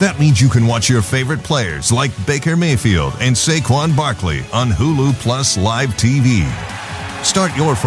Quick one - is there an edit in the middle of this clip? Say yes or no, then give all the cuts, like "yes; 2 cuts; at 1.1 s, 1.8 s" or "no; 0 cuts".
no; 0 cuts